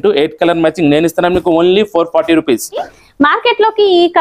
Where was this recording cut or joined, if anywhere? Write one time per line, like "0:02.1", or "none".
0:02.9